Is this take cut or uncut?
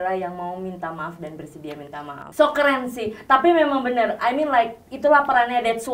cut